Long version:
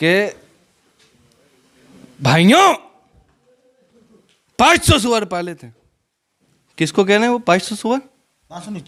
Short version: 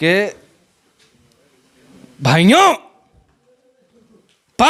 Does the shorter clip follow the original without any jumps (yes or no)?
yes